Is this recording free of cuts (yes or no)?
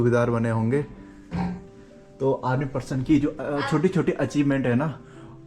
no